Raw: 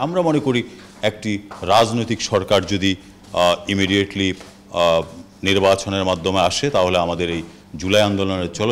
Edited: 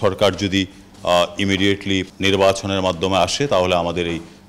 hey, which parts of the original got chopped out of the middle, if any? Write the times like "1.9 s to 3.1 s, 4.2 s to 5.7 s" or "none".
4.4 s to 5.3 s